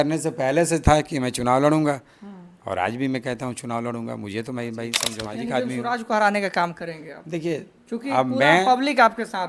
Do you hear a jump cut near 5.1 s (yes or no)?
yes